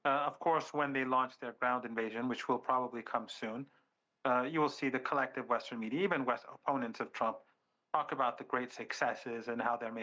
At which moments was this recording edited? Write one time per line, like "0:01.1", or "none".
none